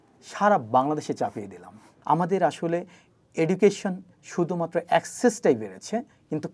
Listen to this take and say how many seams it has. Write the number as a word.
one